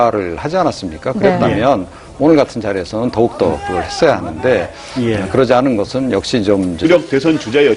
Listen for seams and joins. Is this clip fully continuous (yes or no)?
yes